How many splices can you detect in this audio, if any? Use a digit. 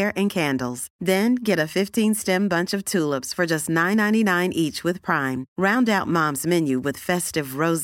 0